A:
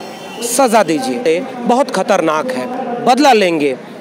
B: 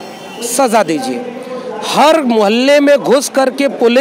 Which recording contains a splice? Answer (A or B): A